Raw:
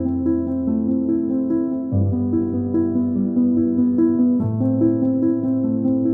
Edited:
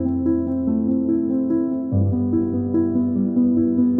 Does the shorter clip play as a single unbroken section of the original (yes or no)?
yes